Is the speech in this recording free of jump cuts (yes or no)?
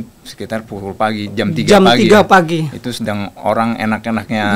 yes